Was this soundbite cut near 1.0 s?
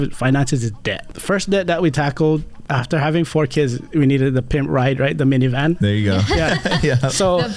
yes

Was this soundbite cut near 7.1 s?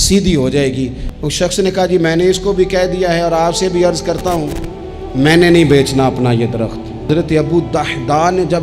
yes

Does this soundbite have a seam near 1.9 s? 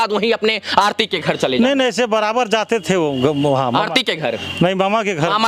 no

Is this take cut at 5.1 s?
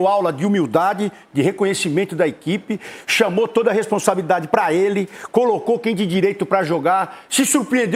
no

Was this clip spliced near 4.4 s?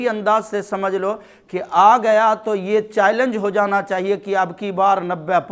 no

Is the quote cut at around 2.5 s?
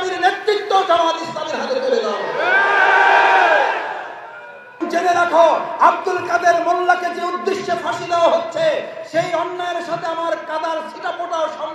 no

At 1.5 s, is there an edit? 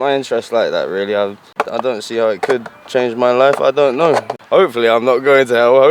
yes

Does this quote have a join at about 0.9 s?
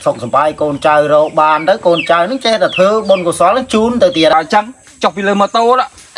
no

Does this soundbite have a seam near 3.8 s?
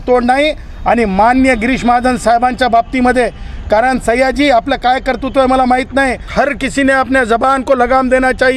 no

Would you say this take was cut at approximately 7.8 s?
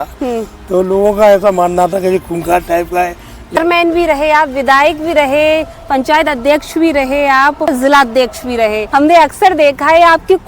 yes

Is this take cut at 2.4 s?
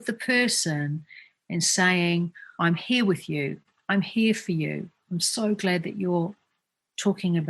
yes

